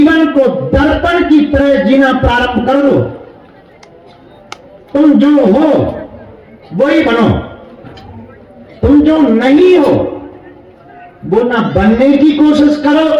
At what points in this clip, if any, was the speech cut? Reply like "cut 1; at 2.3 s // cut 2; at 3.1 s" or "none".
none